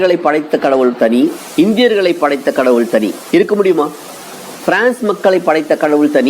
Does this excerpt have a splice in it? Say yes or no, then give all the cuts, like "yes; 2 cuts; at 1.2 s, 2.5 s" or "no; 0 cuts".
yes; 2 cuts; at 1.4 s, 3.2 s